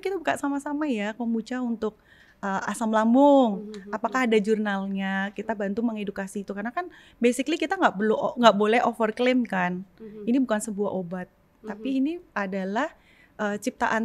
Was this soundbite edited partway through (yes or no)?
no